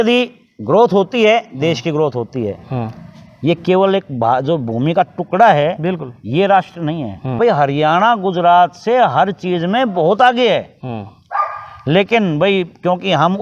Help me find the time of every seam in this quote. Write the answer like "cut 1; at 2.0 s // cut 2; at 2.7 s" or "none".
cut 1; at 7.2 s